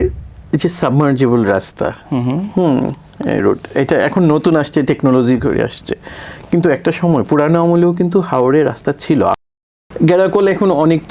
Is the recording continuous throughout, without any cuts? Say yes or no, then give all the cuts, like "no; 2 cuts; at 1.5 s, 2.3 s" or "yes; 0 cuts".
no; 1 cut; at 9.4 s